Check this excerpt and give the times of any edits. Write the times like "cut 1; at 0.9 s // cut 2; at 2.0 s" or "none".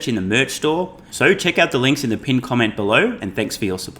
cut 1; at 1.0 s